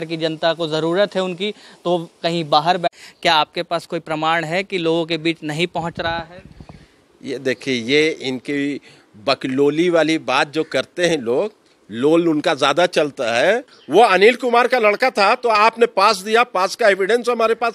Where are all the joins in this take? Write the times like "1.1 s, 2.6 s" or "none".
2.9 s, 13.7 s